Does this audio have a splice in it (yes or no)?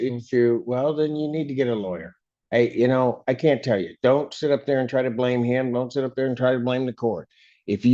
no